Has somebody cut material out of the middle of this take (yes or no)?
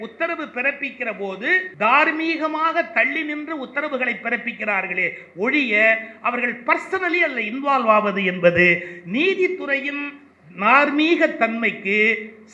yes